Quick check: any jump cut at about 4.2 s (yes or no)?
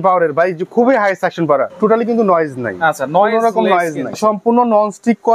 yes